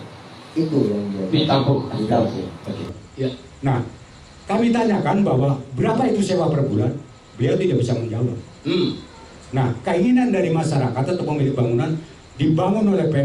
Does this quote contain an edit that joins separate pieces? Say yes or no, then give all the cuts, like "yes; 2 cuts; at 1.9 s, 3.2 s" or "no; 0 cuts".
yes; 1 cut; at 3.0 s